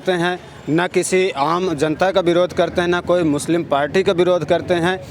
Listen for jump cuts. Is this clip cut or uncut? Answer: uncut